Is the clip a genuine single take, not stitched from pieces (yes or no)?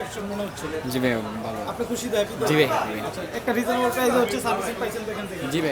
yes